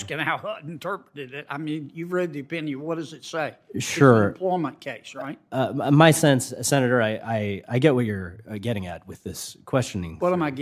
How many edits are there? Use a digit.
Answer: 0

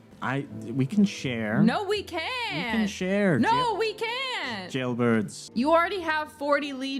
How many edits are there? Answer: 1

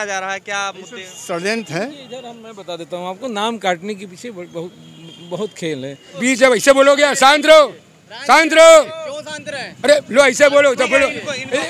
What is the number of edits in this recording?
1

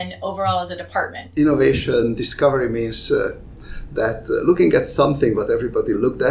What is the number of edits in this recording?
1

